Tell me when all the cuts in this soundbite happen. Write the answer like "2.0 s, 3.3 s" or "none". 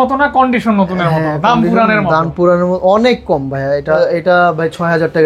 4.0 s